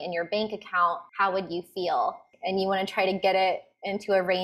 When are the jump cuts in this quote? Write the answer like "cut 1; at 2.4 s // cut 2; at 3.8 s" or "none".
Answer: cut 1; at 1.1 s // cut 2; at 2.3 s